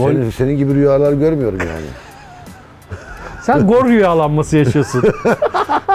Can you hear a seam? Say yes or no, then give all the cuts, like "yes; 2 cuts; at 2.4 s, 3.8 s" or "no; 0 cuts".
no; 0 cuts